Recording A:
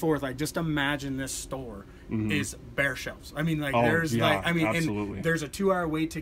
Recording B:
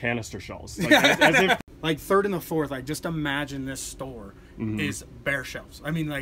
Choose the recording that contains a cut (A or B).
B